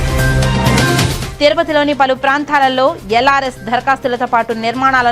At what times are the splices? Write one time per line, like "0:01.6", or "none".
none